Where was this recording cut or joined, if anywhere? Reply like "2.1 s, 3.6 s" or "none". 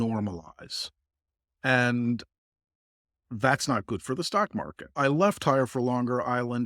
5.0 s

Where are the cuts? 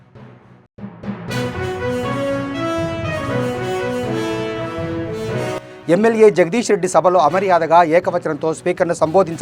5.4 s

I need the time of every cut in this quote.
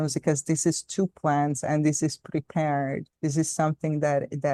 none

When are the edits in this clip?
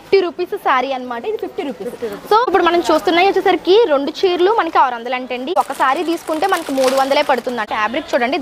2.5 s, 5.5 s, 7.7 s

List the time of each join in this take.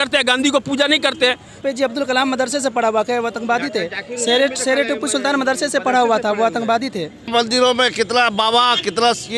1.5 s, 7.3 s

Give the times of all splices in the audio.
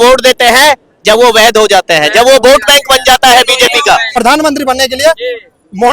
4.2 s

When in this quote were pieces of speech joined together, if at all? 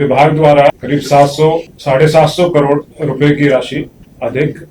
0.8 s, 1.7 s, 2.9 s

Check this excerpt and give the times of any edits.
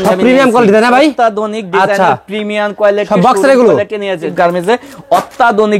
4.3 s

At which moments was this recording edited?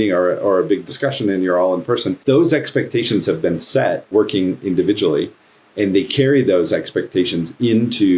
2.2 s, 4.1 s

